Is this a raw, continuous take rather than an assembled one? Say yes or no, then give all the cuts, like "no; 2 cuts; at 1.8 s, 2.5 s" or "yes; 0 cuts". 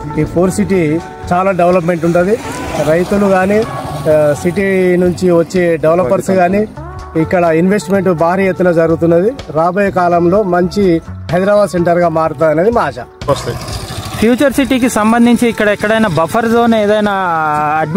no; 1 cut; at 13.3 s